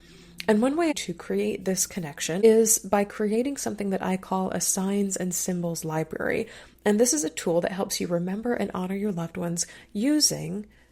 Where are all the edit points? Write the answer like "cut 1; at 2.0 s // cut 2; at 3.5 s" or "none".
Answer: cut 1; at 0.9 s // cut 2; at 2.4 s